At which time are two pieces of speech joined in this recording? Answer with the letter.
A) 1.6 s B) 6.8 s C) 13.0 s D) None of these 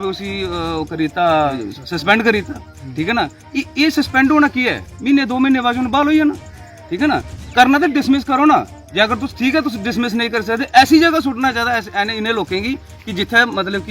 A